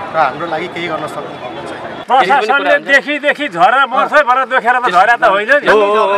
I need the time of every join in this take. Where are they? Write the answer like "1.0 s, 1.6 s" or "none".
2.0 s